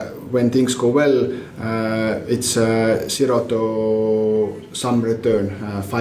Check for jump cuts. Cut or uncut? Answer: uncut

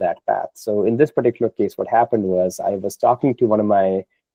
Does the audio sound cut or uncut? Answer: uncut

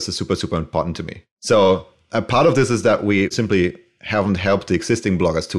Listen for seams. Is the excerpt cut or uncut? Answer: uncut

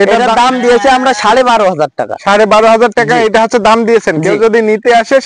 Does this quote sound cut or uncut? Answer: uncut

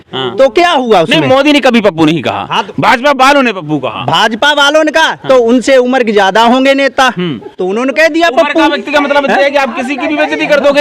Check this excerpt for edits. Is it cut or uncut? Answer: uncut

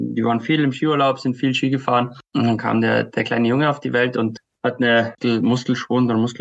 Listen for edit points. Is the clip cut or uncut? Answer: cut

